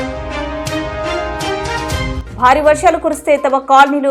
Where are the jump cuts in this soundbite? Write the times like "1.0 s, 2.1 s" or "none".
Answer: 2.2 s